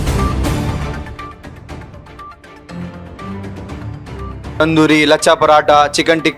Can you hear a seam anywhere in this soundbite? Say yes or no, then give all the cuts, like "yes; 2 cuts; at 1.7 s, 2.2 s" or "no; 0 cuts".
no; 0 cuts